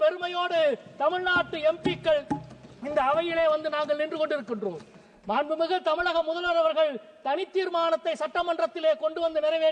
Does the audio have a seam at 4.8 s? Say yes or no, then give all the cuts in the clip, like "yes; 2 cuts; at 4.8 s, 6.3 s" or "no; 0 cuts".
no; 0 cuts